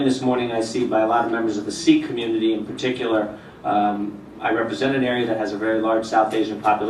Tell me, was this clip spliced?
no; 0 cuts

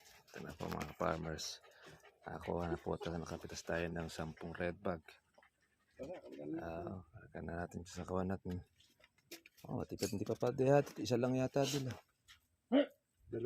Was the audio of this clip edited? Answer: no; 0 cuts

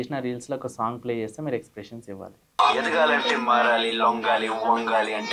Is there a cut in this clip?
yes; 1 cut; at 2.6 s

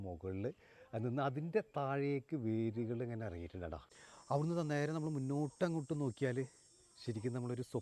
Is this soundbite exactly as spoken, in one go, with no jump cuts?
no; 1 cut; at 3.8 s

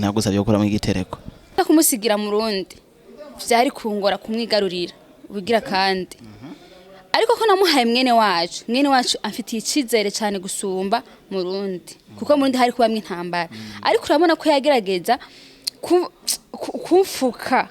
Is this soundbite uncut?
no; 1 cut; at 1.6 s

